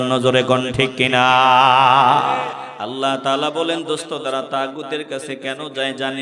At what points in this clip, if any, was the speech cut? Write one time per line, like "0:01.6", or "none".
0:02.7